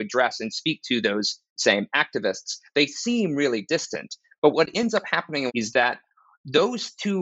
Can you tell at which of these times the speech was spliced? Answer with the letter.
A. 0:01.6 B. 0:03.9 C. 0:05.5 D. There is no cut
C